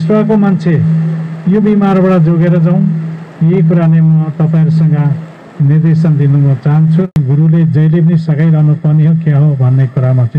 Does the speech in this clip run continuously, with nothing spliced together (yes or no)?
no